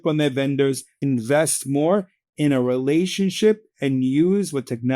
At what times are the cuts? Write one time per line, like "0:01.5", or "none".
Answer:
0:01.0